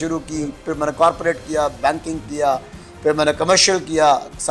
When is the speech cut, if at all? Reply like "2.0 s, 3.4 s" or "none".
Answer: none